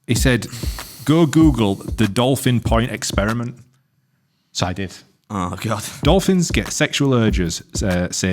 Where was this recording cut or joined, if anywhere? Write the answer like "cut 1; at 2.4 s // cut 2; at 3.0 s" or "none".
cut 1; at 5.9 s